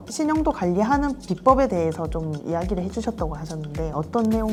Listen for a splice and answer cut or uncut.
uncut